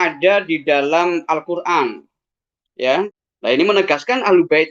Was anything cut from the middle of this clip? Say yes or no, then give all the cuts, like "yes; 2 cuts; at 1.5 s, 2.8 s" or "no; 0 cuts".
yes; 1 cut; at 3.0 s